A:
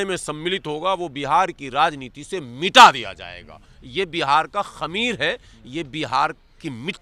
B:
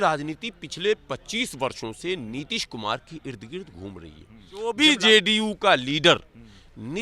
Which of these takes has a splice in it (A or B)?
B